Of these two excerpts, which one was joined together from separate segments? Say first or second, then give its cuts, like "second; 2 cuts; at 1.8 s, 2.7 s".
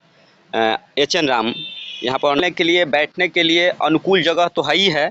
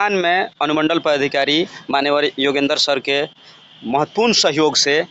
first; 1 cut; at 2.4 s